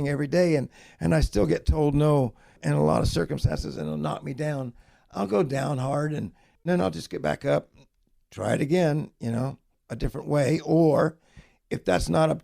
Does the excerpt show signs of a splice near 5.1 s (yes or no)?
no